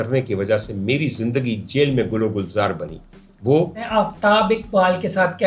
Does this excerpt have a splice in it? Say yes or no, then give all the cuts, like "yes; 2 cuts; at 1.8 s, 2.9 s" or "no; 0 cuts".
yes; 1 cut; at 3.8 s